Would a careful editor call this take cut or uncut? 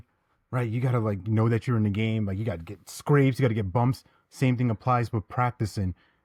uncut